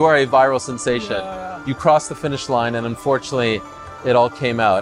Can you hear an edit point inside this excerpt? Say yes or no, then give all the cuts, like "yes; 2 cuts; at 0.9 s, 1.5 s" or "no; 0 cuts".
no; 0 cuts